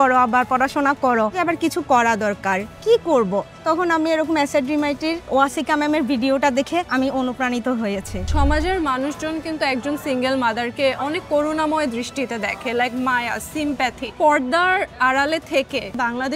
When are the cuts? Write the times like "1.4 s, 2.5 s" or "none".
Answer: 1.3 s, 8.2 s, 14.1 s